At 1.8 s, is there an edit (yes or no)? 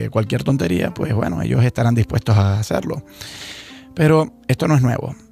yes